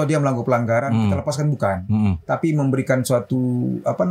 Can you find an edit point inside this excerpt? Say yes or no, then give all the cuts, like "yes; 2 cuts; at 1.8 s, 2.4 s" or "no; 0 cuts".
no; 0 cuts